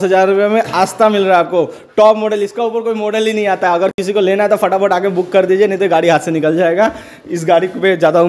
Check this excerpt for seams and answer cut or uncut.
uncut